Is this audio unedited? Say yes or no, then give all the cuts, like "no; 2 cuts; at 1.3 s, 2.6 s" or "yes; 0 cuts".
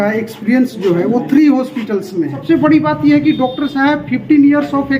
no; 1 cut; at 2.4 s